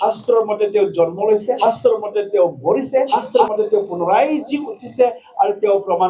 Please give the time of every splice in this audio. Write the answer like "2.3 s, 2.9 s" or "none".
1.6 s, 3.1 s